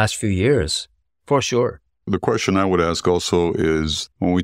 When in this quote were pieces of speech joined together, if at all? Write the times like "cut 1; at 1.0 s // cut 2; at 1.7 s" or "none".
cut 1; at 1.9 s

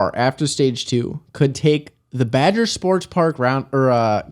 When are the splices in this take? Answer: none

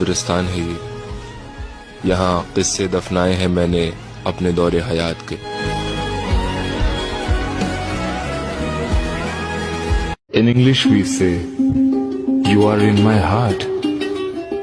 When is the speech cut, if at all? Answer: none

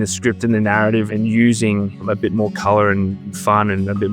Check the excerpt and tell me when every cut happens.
cut 1; at 1.1 s // cut 2; at 2.0 s // cut 3; at 3.2 s

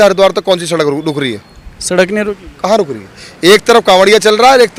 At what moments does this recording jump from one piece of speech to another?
none

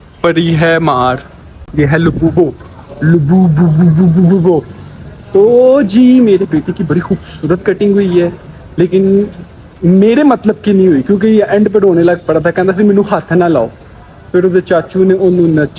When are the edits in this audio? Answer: none

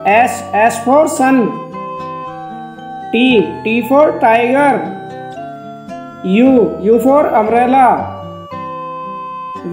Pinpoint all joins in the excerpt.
cut 1; at 4.9 s // cut 2; at 6.2 s

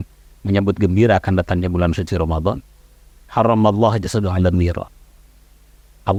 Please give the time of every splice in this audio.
none

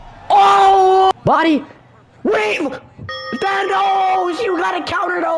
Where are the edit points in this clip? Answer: cut 1; at 1.1 s

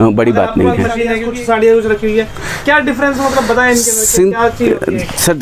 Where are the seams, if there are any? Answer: cut 1; at 1.2 s

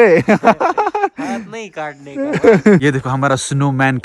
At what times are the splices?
cut 1; at 2.8 s

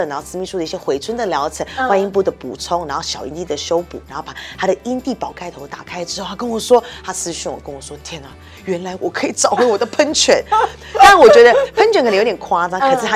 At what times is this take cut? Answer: none

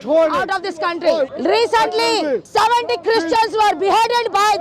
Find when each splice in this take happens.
cut 1; at 1.3 s // cut 2; at 2.4 s

